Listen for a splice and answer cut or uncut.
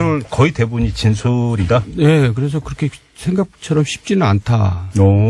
uncut